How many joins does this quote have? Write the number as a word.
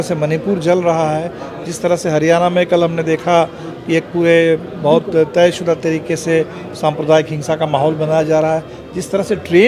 zero